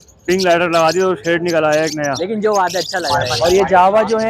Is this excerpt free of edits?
no; 1 cut; at 3.2 s

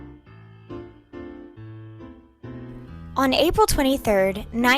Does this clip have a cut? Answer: yes; 1 cut; at 2.9 s

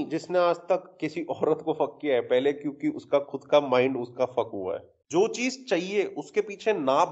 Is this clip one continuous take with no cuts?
no; 1 cut; at 4.9 s

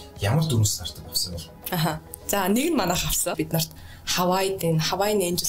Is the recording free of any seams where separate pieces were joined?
no; 1 cut; at 3.3 s

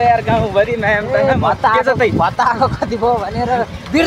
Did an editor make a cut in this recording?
no; 0 cuts

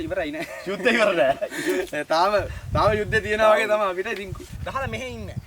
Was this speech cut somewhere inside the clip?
yes; 1 cut; at 4.5 s

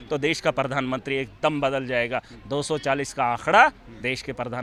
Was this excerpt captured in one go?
yes; 0 cuts

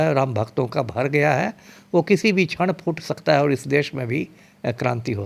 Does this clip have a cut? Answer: no; 0 cuts

